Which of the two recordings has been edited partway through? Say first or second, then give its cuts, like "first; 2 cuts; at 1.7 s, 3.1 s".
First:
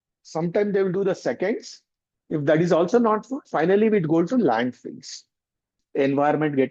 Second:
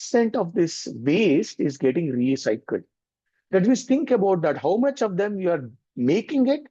first; 1 cut; at 5.8 s